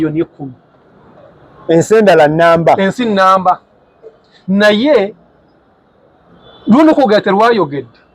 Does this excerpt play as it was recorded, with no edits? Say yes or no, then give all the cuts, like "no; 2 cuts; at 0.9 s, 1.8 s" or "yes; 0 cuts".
yes; 0 cuts